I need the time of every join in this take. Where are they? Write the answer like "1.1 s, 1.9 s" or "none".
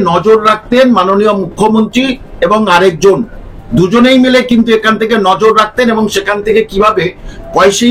none